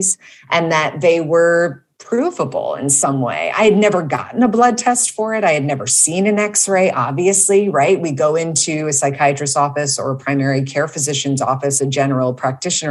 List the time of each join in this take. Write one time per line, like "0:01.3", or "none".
none